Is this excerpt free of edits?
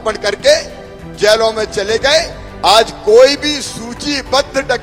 yes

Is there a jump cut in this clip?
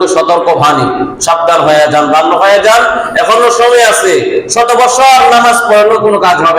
no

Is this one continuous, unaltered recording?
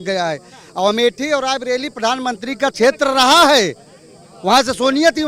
yes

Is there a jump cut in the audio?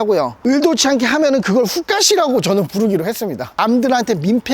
yes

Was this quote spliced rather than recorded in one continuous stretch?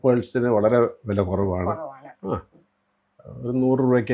no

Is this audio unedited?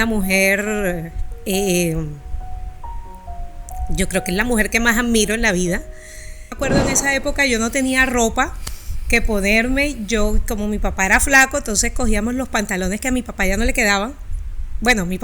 no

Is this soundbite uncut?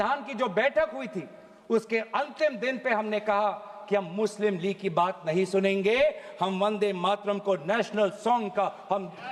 yes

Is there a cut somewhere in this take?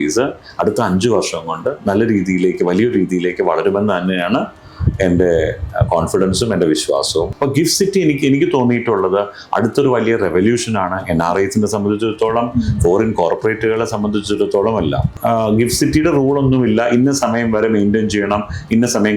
yes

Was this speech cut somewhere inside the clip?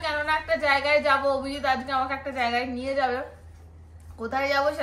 no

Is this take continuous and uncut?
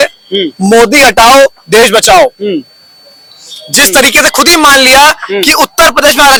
yes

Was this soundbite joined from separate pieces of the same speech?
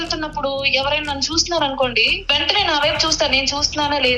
yes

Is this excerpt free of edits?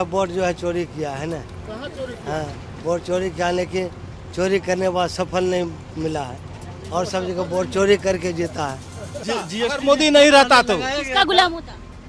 no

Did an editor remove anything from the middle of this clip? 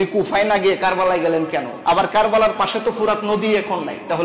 yes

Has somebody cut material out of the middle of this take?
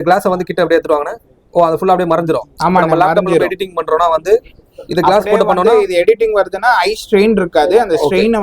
no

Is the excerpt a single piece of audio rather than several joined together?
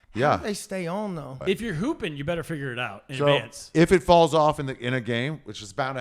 no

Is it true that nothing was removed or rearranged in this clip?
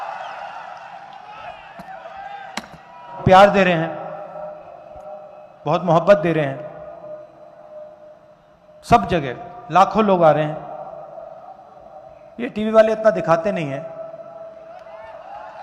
no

